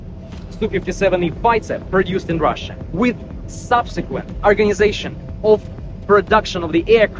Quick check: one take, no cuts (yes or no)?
yes